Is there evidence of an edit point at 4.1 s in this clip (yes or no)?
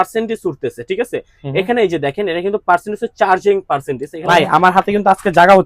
yes